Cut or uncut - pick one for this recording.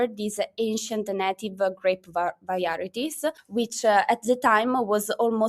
uncut